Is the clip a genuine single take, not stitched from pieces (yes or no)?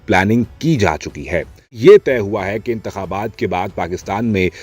no